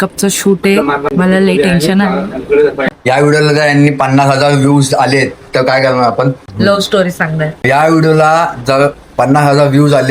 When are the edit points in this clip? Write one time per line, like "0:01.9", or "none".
0:01.0
0:02.6
0:06.4
0:07.6